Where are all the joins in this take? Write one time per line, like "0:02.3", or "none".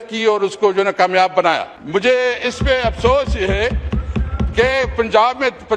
0:01.7